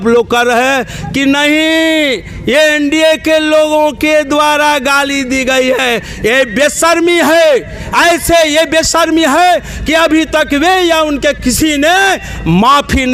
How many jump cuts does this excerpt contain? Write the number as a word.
zero